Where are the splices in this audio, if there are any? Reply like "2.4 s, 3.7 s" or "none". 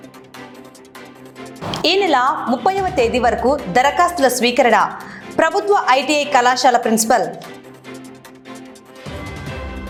none